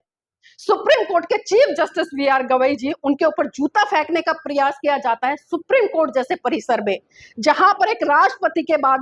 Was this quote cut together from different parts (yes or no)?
no